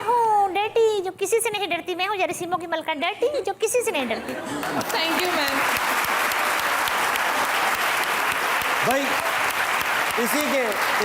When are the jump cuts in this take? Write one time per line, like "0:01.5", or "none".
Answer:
none